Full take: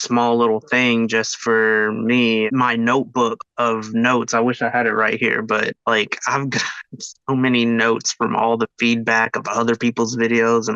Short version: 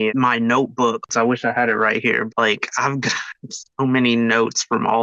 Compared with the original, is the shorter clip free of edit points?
no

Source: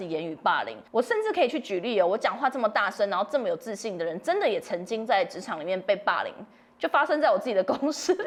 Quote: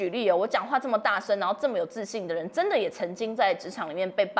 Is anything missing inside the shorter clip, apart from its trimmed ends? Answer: no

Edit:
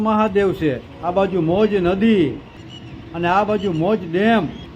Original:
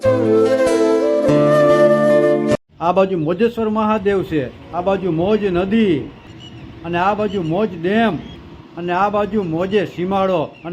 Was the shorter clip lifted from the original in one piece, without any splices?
yes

